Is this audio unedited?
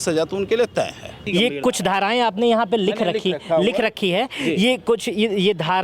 no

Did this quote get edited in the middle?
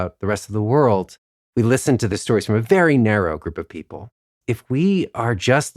yes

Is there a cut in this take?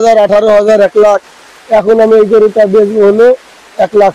no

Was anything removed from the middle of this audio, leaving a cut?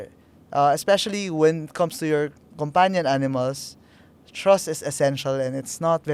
no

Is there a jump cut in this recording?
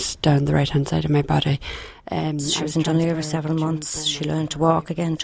yes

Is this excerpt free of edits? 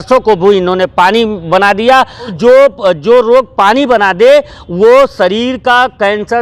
no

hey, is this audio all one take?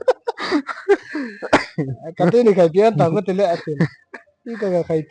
yes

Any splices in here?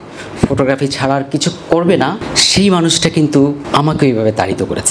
yes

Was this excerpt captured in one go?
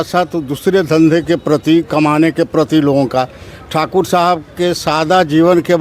yes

